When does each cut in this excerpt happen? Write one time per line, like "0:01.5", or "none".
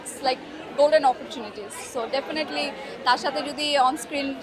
none